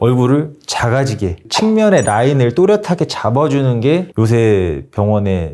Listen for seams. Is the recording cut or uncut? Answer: cut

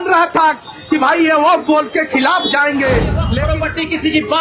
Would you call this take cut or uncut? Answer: cut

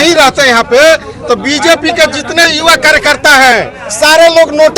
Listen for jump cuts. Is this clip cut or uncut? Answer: uncut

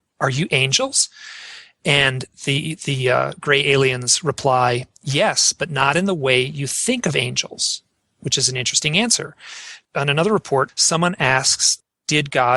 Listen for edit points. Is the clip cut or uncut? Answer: cut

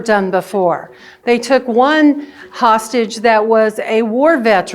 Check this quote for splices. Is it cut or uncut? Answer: uncut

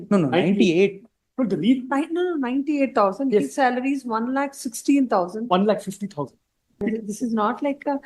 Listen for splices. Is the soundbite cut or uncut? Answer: cut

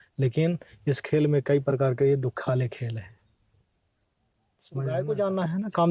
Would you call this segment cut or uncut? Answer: cut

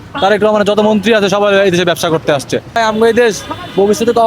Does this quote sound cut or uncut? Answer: cut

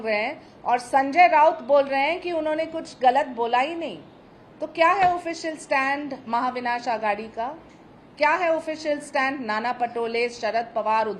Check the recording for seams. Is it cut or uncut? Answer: uncut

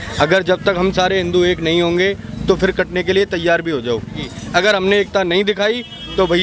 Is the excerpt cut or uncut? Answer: cut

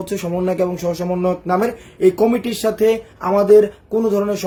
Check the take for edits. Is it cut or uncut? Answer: uncut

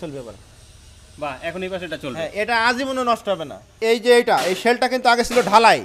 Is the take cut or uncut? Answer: cut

